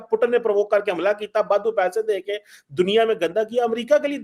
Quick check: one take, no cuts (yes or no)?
yes